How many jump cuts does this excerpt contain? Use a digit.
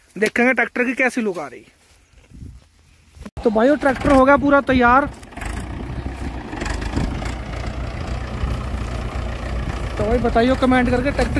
1